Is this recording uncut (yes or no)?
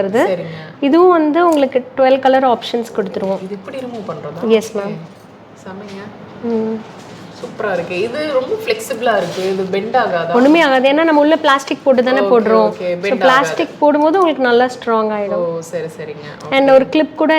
yes